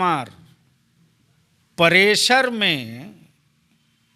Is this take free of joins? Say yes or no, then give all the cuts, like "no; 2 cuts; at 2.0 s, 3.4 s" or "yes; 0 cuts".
yes; 0 cuts